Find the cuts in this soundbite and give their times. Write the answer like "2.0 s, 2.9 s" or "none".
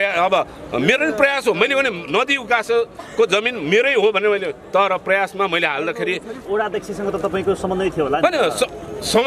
6.3 s